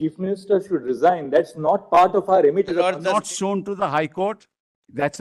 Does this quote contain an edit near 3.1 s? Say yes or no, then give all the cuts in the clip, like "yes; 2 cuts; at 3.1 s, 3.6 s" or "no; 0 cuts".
yes; 1 cut; at 3.1 s